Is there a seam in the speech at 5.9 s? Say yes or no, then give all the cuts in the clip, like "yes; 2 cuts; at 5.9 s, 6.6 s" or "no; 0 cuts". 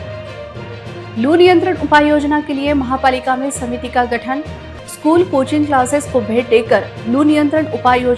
no; 1 cut; at 1.1 s